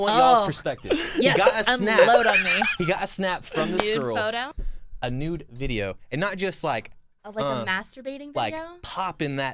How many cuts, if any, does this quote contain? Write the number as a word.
one